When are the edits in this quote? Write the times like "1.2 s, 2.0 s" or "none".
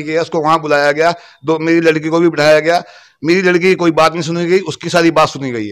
none